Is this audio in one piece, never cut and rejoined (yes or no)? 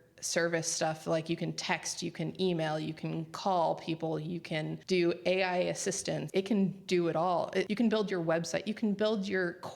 no